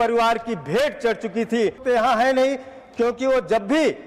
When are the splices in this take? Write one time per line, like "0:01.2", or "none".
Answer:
0:01.8